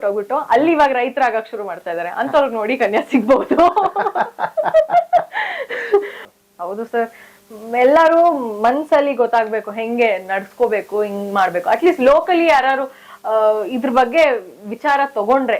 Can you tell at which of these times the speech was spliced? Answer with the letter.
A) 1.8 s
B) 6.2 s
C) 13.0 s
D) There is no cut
B